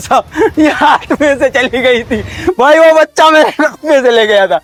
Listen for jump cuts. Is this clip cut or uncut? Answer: uncut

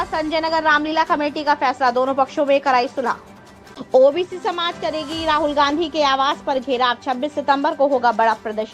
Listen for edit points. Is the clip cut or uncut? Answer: cut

